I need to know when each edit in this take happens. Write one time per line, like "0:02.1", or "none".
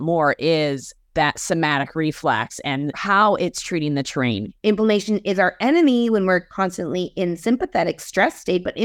0:03.0
0:04.5